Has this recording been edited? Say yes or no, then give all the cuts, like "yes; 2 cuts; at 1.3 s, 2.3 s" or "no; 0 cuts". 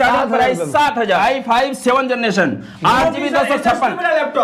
yes; 1 cut; at 1.2 s